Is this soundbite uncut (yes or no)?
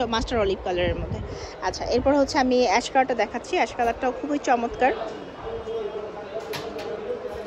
yes